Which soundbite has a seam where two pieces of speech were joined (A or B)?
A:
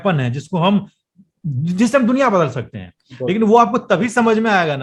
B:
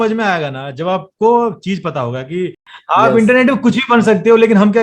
B